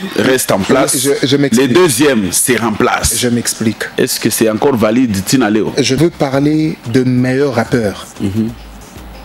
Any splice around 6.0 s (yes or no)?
yes